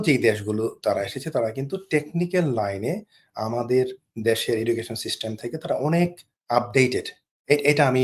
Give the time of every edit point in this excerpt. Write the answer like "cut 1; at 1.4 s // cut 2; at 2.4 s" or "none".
none

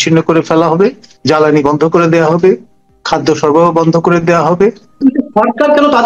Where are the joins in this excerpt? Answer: cut 1; at 1.1 s // cut 2; at 5.0 s

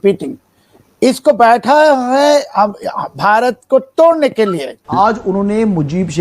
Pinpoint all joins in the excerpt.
cut 1; at 4.9 s

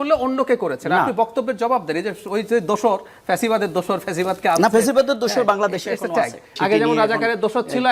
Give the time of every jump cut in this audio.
cut 1; at 6.5 s

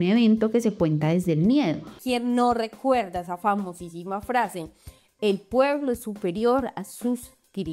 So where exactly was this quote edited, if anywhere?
cut 1; at 1.9 s

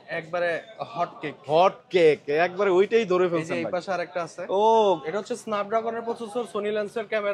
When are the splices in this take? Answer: cut 1; at 5.0 s

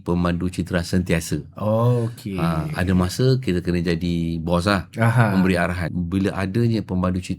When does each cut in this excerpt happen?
cut 1; at 5.9 s

